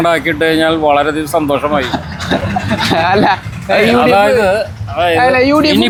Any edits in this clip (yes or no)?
no